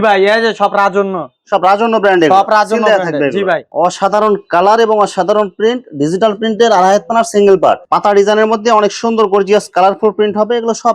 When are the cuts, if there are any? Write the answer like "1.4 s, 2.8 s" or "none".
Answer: 3.7 s, 7.8 s